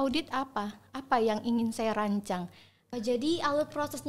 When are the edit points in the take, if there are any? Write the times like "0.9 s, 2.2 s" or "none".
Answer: 2.8 s